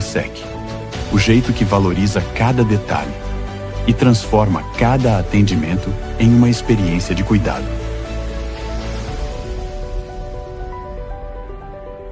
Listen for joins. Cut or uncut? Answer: uncut